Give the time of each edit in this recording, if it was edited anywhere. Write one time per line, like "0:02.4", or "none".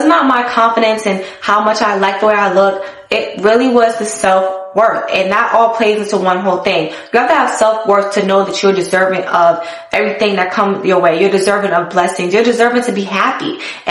none